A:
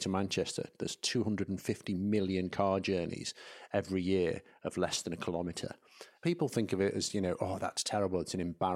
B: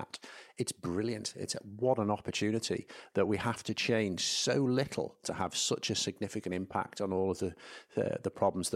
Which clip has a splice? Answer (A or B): A